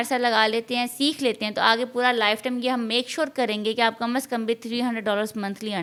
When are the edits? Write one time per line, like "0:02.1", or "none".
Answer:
none